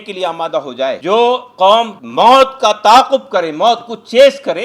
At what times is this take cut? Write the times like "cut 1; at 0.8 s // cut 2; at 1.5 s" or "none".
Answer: cut 1; at 1.0 s // cut 2; at 2.0 s